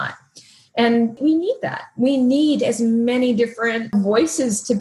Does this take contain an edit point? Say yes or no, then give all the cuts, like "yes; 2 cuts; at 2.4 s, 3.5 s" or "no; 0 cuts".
yes; 2 cuts; at 1.2 s, 3.9 s